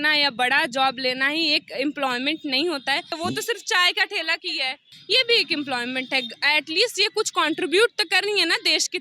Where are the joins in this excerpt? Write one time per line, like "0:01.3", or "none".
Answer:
0:03.2
0:04.9